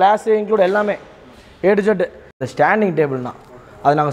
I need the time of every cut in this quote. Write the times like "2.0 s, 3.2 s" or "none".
2.4 s